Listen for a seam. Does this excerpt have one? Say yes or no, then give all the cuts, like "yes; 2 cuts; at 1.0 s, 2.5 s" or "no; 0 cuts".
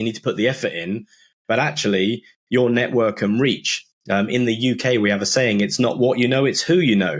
no; 0 cuts